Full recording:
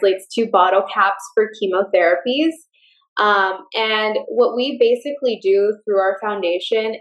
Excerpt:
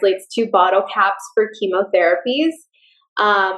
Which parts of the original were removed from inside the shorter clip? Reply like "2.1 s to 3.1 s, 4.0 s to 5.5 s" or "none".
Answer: none

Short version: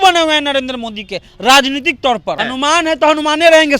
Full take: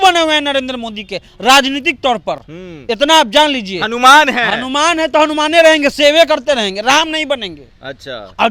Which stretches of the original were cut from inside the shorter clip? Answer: 2.5 s to 4.6 s

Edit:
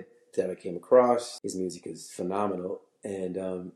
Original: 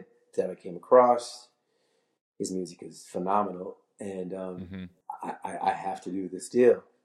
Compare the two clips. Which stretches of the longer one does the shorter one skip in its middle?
1.3 s to 2.3 s

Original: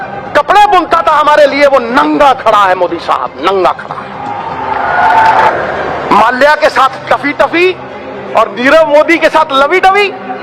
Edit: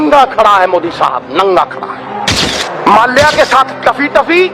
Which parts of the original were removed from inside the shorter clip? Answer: 4.6 s to 5.7 s

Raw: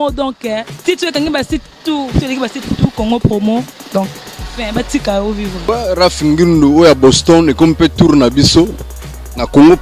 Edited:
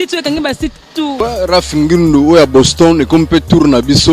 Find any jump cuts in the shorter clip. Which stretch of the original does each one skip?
2.0 s to 5.6 s

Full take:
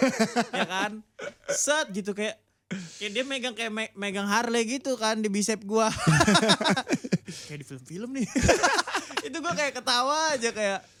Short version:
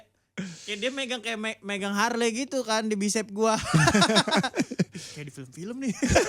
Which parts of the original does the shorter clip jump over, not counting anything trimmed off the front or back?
none

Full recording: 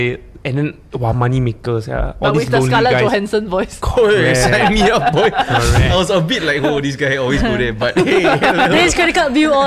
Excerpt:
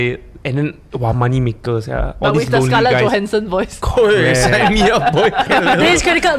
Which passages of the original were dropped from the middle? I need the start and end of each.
5.5 s to 8.4 s

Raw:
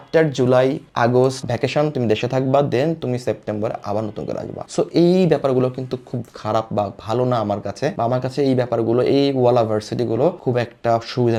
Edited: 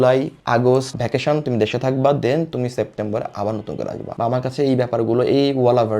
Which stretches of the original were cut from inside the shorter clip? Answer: 4.6 s to 7.9 s

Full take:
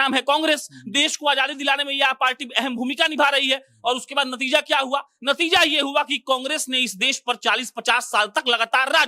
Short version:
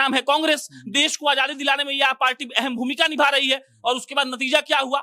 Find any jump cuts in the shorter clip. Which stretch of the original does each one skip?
none

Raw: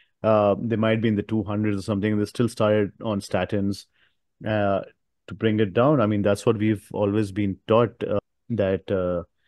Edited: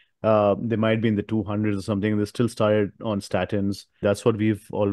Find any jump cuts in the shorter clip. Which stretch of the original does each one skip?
4.0 s to 6.2 s

